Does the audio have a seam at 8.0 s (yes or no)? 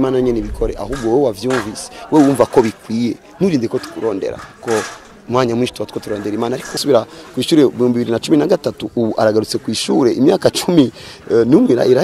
no